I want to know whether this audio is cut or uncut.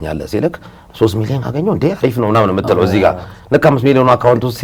uncut